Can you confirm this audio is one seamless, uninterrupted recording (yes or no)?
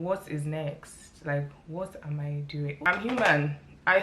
no